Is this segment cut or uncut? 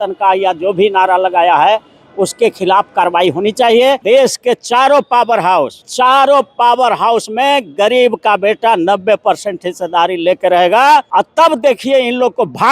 cut